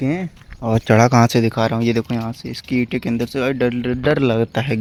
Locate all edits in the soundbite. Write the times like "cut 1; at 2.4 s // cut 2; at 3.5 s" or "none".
none